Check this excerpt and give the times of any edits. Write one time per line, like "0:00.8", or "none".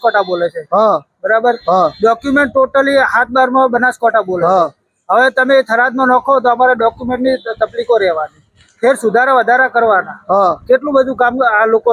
none